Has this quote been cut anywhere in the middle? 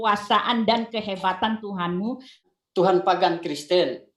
yes; 1 cut; at 2.4 s

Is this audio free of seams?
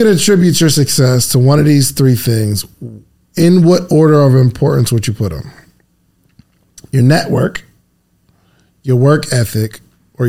yes; 0 cuts

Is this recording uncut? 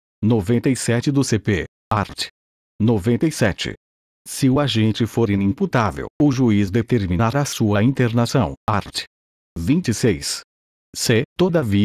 no; 1 cut; at 1.3 s

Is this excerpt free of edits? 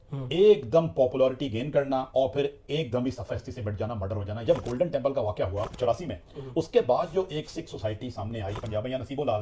no; 3 cuts; at 4.4 s, 5.8 s, 8.7 s

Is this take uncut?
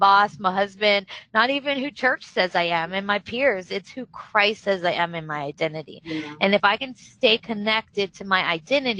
yes; 0 cuts

